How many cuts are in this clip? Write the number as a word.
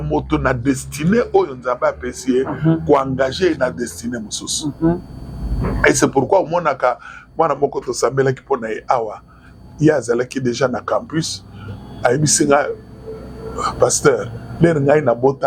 zero